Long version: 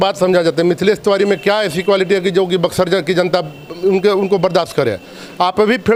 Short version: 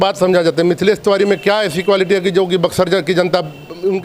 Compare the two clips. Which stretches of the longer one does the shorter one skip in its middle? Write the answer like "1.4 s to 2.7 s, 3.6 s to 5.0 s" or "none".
none